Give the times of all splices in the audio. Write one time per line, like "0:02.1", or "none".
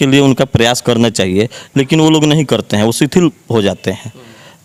none